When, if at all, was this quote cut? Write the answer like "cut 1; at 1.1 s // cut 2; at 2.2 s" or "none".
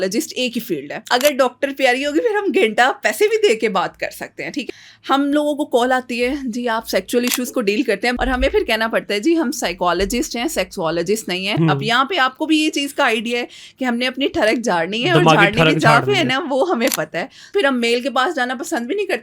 cut 1; at 1.0 s // cut 2; at 4.7 s // cut 3; at 8.1 s // cut 4; at 11.5 s // cut 5; at 17.5 s